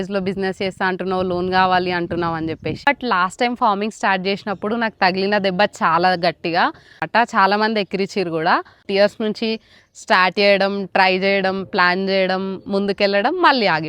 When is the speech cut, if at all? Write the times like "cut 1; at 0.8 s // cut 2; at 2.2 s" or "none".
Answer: cut 1; at 2.8 s // cut 2; at 7.0 s // cut 3; at 8.8 s